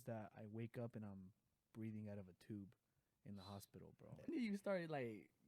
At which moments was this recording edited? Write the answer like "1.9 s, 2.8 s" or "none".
4.3 s